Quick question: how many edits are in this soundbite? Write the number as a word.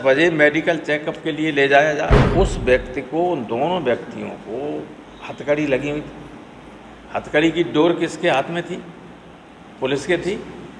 one